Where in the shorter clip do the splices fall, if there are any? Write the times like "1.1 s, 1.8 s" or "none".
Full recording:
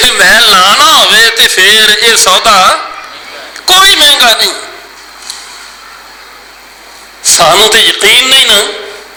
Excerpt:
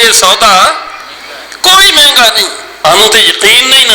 2.8 s